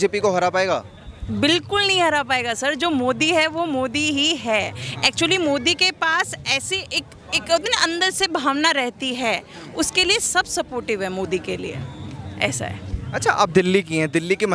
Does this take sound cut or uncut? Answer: uncut